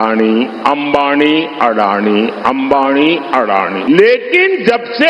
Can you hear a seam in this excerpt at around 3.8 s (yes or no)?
yes